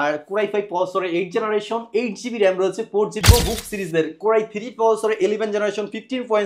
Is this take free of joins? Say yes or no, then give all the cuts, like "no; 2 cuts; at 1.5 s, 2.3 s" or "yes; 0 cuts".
no; 1 cut; at 3.2 s